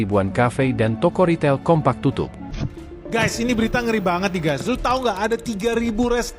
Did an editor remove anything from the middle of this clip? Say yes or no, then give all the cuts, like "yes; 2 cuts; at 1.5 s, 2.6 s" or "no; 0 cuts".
yes; 1 cut; at 2.6 s